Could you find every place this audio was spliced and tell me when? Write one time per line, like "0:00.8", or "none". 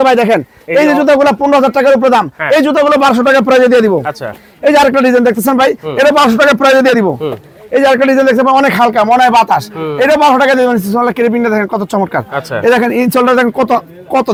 none